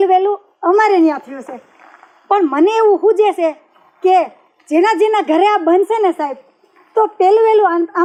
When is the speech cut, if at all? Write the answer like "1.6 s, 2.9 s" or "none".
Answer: none